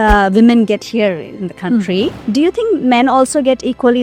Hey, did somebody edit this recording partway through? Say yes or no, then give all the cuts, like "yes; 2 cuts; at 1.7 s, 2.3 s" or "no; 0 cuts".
yes; 1 cut; at 2.2 s